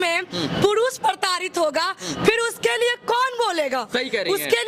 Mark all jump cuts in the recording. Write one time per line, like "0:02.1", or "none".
none